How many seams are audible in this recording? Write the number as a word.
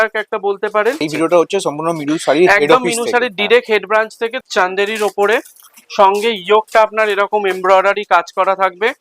two